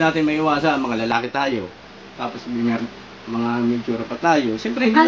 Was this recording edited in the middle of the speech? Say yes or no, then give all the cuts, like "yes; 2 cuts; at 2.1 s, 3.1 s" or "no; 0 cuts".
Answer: no; 0 cuts